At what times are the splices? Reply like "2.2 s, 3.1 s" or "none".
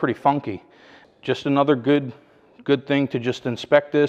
1.0 s

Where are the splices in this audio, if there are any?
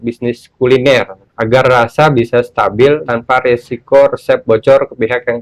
1.2 s, 3.0 s

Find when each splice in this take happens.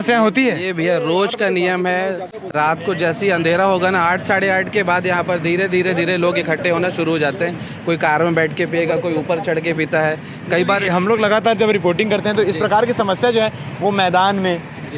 none

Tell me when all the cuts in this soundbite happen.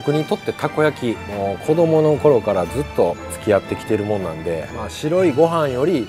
1.3 s, 3.3 s, 4.7 s

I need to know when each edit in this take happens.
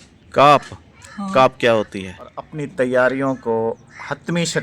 2.6 s

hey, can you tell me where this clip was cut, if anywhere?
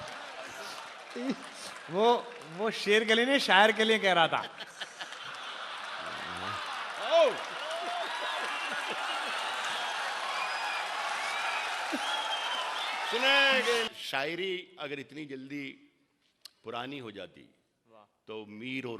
13.9 s

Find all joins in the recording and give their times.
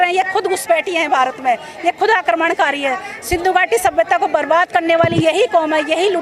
none

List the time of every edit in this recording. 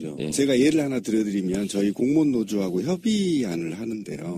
2.5 s

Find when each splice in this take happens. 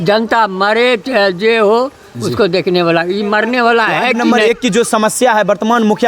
4.2 s

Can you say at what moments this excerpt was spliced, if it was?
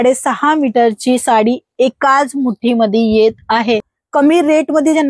4.0 s

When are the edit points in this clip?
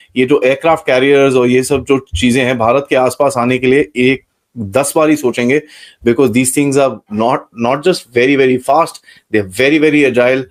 none

